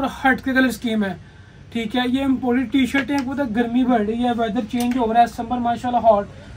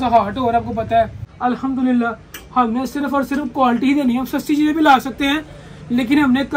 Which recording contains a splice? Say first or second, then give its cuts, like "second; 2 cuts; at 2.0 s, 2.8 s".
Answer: second; 1 cut; at 1.2 s